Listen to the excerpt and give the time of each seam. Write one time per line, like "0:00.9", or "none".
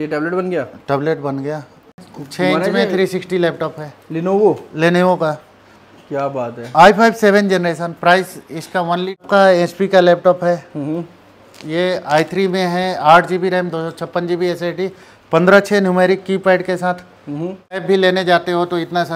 0:02.0
0:09.2
0:17.8